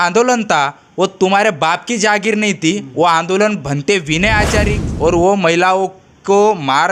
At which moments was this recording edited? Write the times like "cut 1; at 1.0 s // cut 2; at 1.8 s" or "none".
cut 1; at 4.8 s